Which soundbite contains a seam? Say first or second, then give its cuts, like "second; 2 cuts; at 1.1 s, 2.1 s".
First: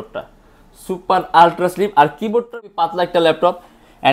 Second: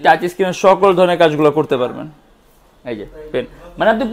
first; 1 cut; at 2.4 s